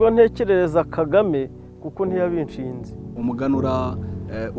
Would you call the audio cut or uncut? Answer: cut